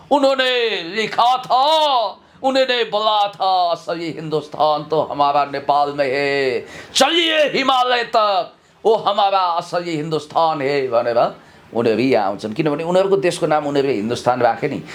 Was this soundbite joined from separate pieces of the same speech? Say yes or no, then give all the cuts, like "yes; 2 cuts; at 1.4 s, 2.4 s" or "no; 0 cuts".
no; 0 cuts